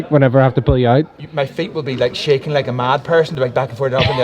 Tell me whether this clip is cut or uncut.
uncut